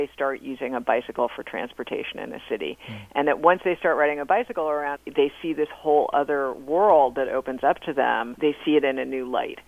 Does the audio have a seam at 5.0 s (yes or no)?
yes